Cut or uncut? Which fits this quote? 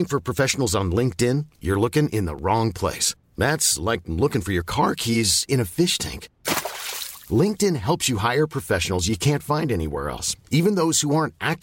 uncut